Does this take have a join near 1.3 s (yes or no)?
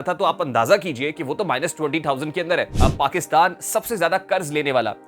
no